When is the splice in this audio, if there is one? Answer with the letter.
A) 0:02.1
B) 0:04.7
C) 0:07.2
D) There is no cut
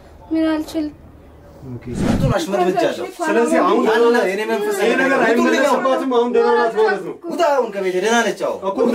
A